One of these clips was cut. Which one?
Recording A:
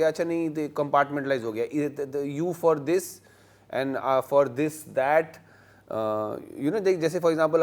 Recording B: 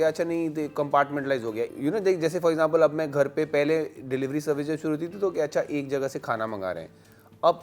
B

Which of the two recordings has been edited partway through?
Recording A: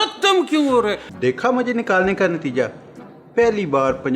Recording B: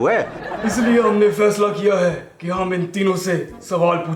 A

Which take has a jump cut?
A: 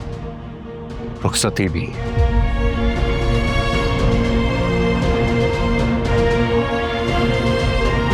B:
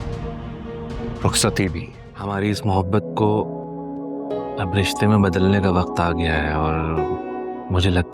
B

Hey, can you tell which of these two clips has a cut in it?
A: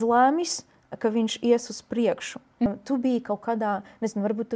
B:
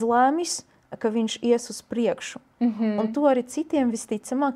A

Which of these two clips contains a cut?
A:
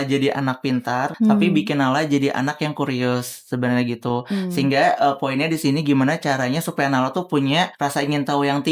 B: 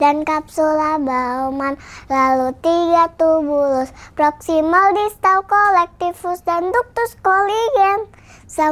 A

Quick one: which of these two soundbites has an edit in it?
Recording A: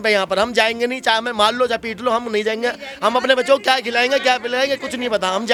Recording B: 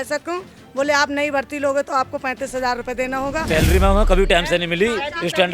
B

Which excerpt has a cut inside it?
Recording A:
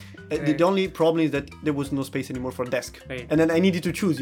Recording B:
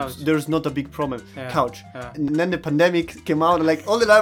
B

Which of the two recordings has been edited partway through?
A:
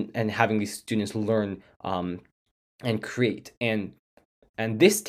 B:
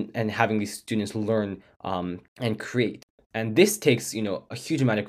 B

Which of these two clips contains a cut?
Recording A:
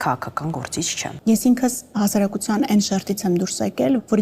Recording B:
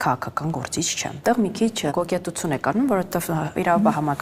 A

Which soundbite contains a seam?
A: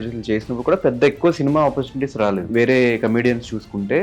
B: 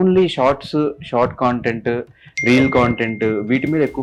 A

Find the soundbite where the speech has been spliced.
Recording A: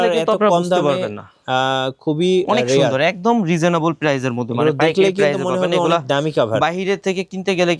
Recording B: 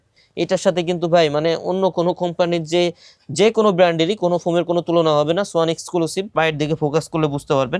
B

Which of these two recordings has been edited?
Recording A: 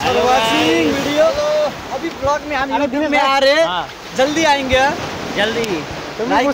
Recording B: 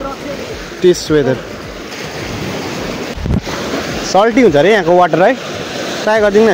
B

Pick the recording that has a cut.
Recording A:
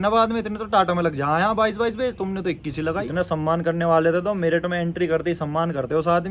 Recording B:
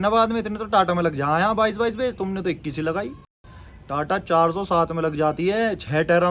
A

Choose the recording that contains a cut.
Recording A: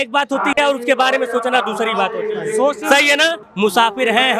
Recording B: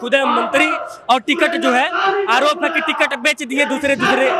A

